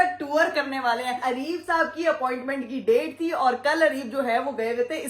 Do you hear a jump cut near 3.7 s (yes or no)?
no